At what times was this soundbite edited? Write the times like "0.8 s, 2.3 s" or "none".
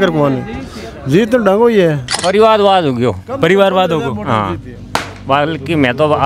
2.2 s